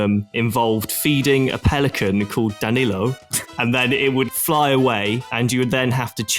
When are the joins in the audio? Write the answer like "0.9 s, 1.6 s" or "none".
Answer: 3.5 s, 5.3 s